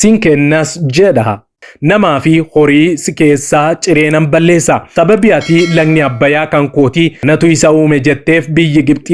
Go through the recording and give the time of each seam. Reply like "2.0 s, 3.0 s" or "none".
1.5 s, 4.9 s, 7.2 s